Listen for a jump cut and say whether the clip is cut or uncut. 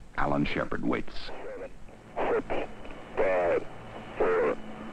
cut